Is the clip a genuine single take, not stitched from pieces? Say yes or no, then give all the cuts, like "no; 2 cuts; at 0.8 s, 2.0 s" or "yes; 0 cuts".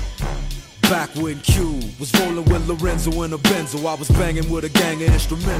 yes; 0 cuts